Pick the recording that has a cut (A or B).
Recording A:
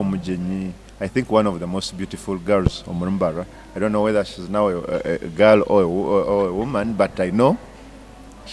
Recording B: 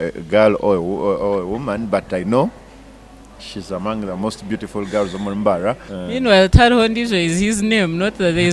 B